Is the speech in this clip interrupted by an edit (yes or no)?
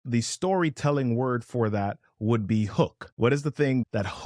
no